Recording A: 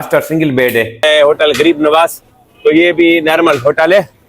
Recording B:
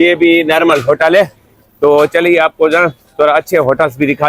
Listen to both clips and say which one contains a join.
A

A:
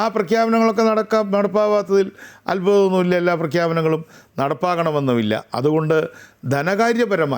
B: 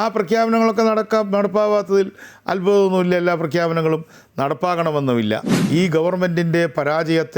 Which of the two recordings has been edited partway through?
B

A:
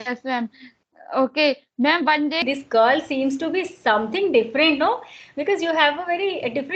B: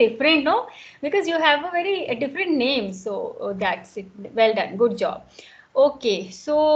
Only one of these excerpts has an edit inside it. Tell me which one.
A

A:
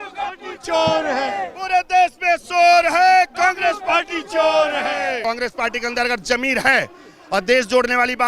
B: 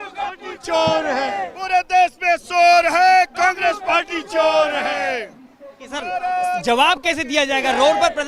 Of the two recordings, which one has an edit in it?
A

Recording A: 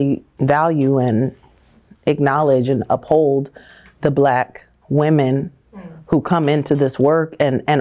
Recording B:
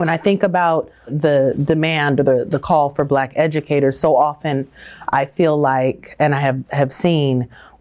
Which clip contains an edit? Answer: B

